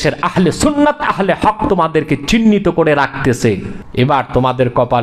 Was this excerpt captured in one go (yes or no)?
no